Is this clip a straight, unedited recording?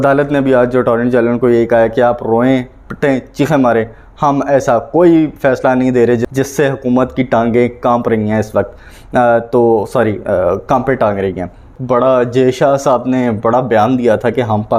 no; 2 cuts; at 6.3 s, 11.7 s

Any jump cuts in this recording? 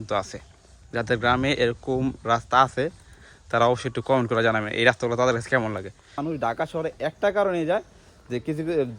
yes; 1 cut; at 6.2 s

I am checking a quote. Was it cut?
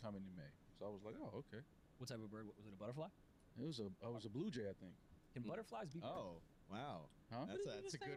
no; 0 cuts

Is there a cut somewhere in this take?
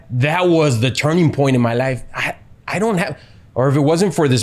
no; 0 cuts

